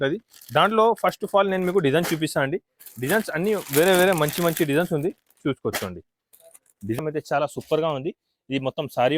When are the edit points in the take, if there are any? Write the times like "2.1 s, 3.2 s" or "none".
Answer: 7.0 s